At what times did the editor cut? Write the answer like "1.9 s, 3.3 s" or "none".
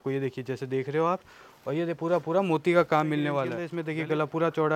3.8 s